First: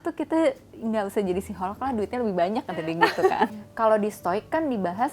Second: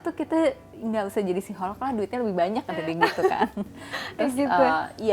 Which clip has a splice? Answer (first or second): first